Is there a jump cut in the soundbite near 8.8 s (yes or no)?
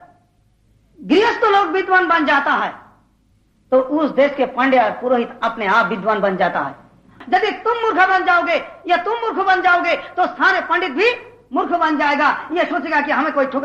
no